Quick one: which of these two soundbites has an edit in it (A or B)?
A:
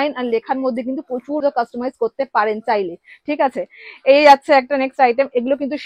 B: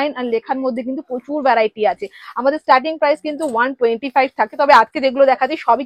A